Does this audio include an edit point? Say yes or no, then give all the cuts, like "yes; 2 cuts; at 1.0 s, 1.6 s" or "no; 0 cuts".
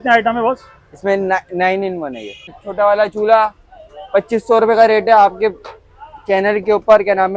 yes; 1 cut; at 2.6 s